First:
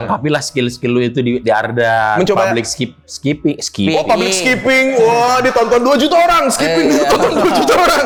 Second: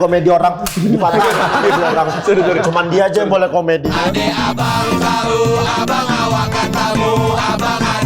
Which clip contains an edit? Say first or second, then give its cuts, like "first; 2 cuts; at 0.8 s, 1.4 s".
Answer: second; 1 cut; at 3.8 s